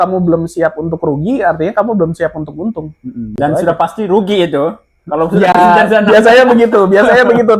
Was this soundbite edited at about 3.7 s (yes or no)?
no